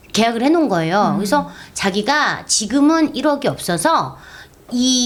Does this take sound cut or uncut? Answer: uncut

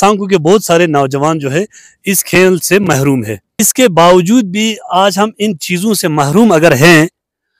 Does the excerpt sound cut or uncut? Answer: cut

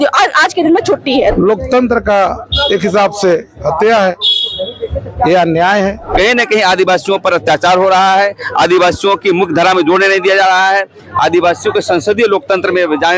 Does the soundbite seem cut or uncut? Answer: cut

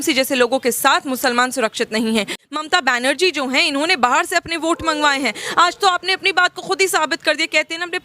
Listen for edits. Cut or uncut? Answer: cut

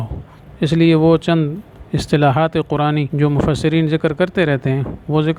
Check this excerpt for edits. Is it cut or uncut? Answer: cut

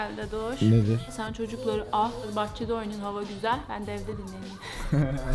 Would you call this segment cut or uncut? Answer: cut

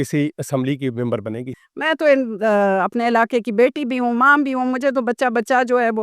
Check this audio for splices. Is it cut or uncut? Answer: cut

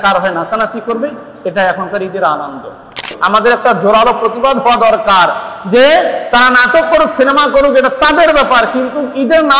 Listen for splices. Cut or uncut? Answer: cut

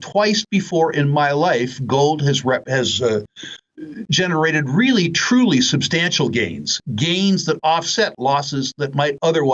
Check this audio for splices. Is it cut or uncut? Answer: uncut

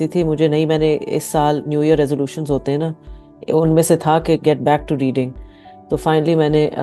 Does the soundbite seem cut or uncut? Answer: uncut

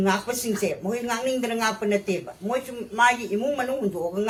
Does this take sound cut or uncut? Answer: uncut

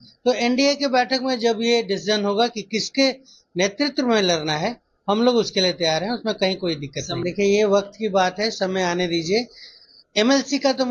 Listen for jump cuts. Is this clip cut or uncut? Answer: cut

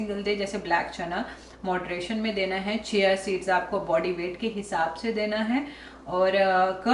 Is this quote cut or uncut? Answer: uncut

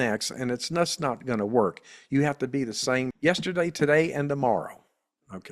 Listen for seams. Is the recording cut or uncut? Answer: cut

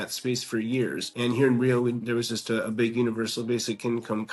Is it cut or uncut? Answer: cut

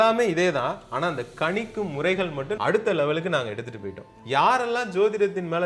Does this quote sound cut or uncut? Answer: cut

